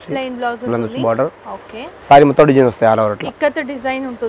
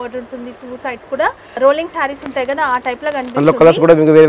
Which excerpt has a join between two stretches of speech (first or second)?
second